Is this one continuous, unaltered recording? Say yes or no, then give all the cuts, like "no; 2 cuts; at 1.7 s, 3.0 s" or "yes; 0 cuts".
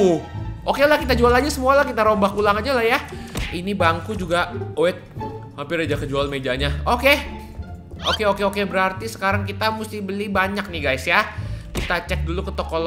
yes; 0 cuts